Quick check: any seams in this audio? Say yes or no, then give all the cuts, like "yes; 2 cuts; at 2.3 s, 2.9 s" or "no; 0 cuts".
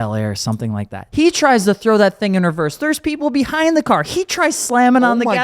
yes; 1 cut; at 1.0 s